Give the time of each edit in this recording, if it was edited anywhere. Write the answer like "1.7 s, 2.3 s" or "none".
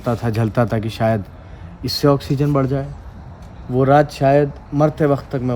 4.6 s